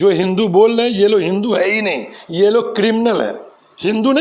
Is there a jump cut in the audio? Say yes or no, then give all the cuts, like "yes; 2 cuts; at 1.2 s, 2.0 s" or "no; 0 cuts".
no; 0 cuts